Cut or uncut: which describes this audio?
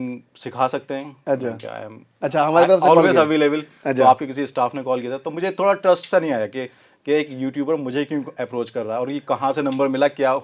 uncut